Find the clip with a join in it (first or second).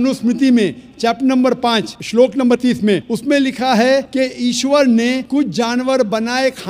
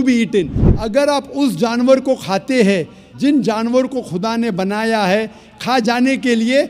first